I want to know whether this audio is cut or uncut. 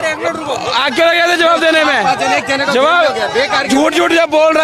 uncut